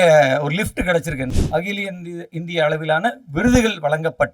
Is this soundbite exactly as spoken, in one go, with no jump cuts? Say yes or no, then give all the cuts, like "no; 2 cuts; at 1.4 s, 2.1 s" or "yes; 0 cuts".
no; 1 cut; at 1.3 s